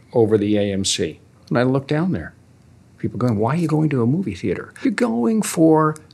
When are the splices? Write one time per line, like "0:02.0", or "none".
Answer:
0:01.4
0:04.7